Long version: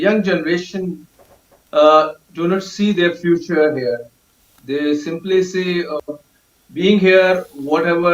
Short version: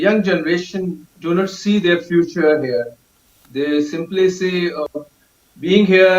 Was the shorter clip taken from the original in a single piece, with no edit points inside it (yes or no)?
no